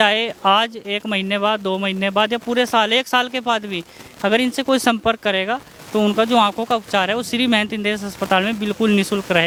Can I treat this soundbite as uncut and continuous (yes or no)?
yes